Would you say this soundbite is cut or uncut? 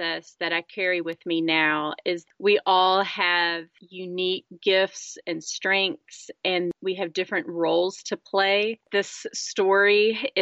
cut